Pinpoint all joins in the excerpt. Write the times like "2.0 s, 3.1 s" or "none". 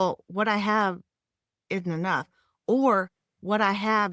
none